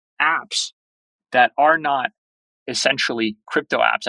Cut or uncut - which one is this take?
uncut